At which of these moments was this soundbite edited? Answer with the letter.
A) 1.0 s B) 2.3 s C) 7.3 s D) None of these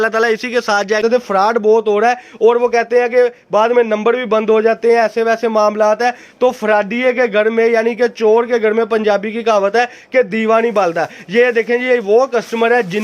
A